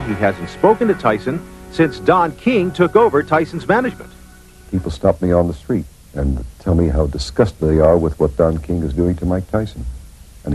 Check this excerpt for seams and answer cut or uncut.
uncut